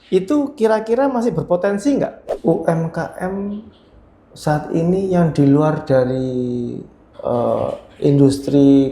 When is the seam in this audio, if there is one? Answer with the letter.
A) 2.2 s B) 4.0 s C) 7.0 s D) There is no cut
A